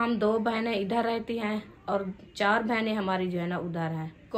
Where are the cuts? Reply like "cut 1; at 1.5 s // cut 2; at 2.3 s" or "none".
none